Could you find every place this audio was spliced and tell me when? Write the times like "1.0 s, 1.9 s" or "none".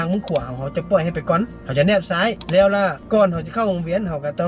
1.6 s, 3.0 s